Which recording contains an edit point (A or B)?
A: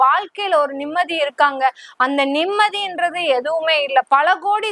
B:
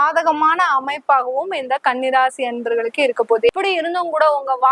B